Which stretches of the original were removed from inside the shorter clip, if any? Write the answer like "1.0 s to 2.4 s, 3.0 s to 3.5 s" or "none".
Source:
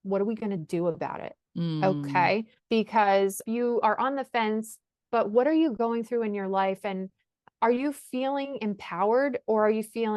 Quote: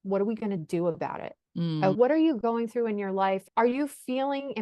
2.0 s to 5.3 s, 6.8 s to 7.5 s